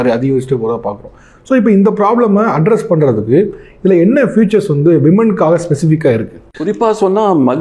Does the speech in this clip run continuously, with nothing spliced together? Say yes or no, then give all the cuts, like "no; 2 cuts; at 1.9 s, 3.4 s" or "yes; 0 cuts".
no; 1 cut; at 6.7 s